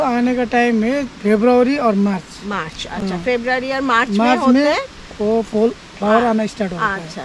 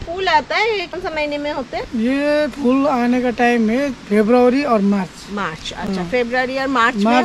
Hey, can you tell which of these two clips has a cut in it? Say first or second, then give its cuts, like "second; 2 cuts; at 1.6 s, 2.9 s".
second; 1 cut; at 0.9 s